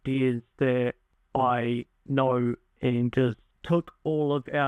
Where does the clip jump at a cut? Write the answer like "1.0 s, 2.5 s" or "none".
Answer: 1.1 s, 3.4 s